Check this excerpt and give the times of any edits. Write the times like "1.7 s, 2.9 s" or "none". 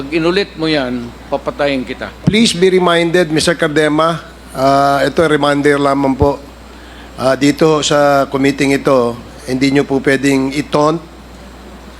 2.2 s